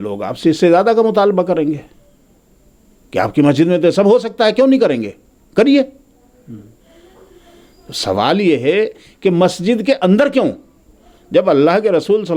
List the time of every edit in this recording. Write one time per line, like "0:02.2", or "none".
none